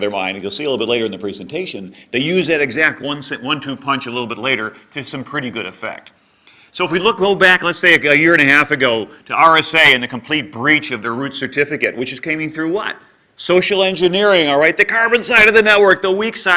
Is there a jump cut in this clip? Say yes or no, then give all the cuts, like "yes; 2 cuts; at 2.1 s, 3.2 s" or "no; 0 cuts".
no; 0 cuts